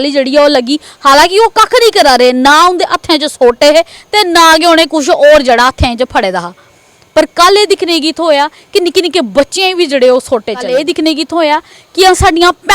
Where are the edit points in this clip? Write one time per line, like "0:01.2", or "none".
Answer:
0:10.6